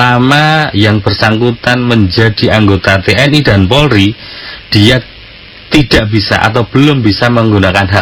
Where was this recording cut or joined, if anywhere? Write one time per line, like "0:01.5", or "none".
none